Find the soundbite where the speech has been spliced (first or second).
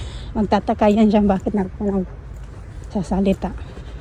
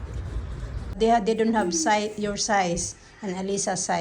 second